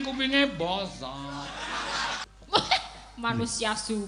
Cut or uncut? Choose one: cut